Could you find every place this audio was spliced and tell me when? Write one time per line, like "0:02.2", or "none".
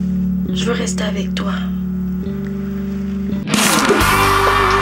0:03.4